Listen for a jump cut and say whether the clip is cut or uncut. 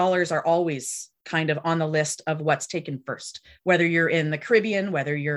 uncut